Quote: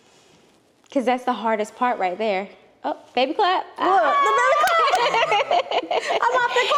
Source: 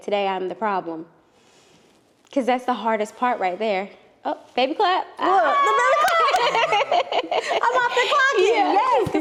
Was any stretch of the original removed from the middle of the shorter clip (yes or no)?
no